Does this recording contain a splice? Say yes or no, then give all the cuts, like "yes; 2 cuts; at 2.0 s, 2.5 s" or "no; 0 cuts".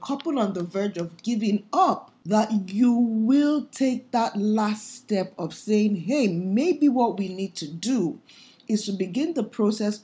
yes; 1 cut; at 2.1 s